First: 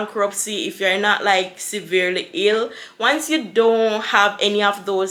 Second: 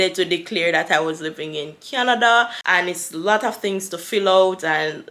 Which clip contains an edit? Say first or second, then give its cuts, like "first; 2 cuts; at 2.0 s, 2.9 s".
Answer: second; 1 cut; at 2.6 s